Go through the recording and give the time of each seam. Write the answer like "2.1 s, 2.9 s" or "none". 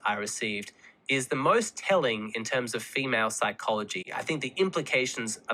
none